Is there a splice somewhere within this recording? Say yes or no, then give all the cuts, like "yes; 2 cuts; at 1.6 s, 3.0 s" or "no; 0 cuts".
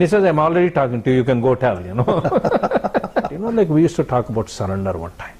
yes; 1 cut; at 3.4 s